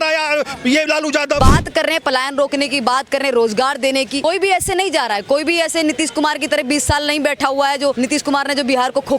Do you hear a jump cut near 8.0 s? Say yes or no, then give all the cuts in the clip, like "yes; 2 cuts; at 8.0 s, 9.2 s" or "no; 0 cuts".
yes; 3 cuts; at 1.4 s, 4.2 s, 8.0 s